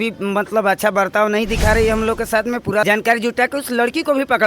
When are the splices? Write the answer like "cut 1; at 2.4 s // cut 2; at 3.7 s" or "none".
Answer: cut 1; at 2.8 s

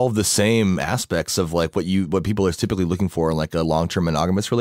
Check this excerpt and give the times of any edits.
none

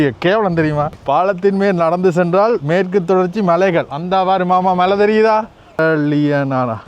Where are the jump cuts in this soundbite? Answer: cut 1; at 1.0 s // cut 2; at 5.8 s

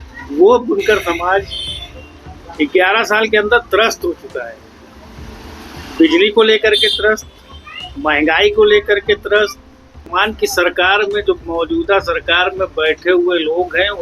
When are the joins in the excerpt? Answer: cut 1; at 10.1 s

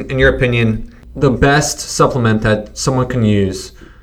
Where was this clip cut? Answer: cut 1; at 0.9 s

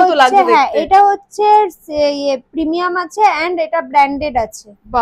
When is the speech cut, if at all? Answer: none

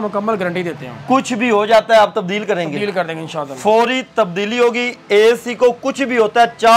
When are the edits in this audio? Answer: none

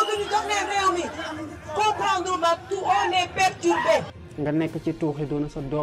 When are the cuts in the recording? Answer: cut 1; at 4.2 s

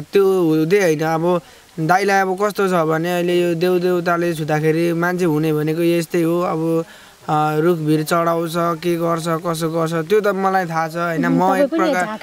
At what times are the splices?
none

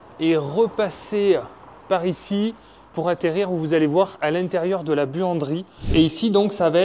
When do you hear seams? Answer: cut 1; at 5.7 s

